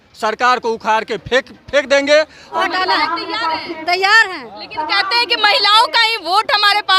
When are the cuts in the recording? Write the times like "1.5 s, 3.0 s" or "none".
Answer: 2.4 s